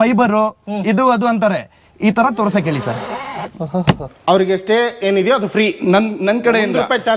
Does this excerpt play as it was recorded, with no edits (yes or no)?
no